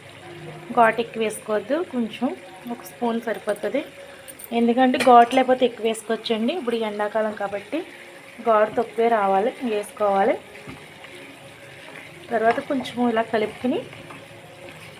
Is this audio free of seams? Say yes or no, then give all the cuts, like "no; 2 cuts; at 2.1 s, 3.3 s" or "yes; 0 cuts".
yes; 0 cuts